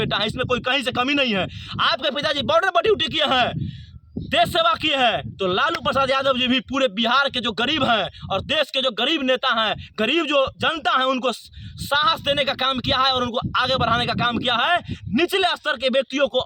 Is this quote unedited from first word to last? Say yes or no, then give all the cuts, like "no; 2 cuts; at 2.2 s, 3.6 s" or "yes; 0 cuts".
yes; 0 cuts